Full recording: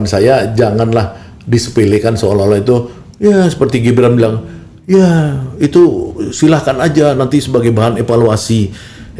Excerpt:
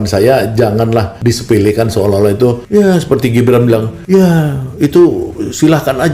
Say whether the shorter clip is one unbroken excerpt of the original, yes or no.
no